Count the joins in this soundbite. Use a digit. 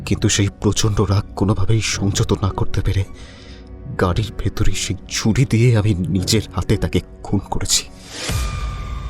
1